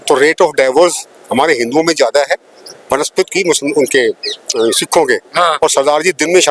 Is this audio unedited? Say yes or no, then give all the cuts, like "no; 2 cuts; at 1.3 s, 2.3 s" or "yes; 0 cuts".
yes; 0 cuts